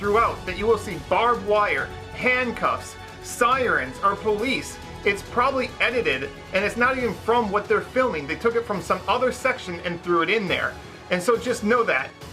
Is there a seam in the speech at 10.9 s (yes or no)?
no